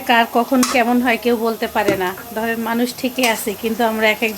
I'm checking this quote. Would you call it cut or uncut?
uncut